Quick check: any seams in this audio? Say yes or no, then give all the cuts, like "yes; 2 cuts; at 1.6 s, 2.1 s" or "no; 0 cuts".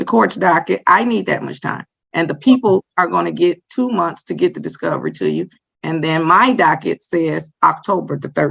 yes; 1 cut; at 3.6 s